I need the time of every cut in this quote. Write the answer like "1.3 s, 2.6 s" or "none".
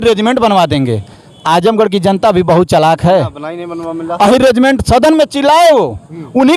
none

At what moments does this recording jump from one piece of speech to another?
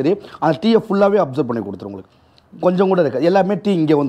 none

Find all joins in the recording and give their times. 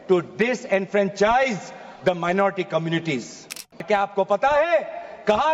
3.8 s

